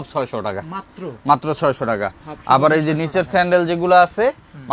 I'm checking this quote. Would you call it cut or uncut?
uncut